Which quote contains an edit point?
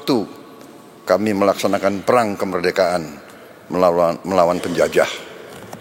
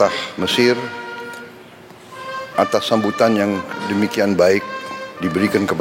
first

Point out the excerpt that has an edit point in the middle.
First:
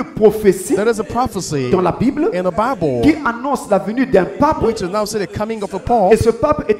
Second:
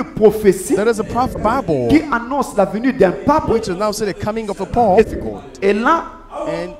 second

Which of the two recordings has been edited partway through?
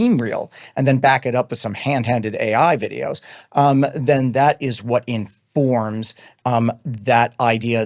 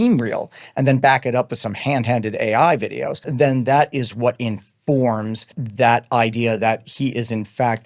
second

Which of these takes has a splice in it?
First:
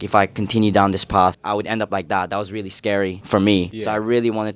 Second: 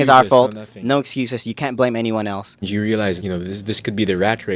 second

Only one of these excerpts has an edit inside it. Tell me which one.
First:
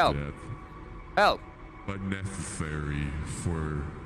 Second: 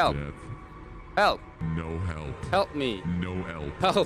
second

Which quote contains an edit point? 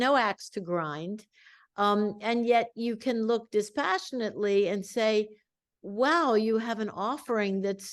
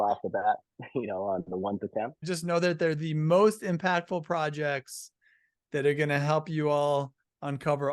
second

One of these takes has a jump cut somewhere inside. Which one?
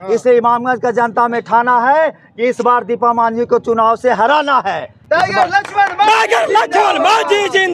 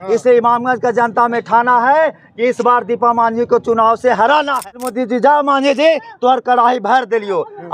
second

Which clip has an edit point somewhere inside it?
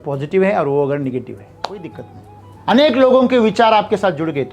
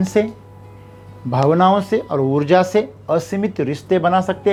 first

